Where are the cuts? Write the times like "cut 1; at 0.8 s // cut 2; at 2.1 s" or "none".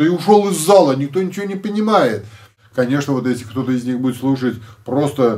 cut 1; at 2.6 s